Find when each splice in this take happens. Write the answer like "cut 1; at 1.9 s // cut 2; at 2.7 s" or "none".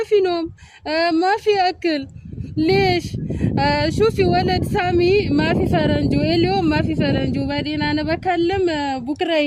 none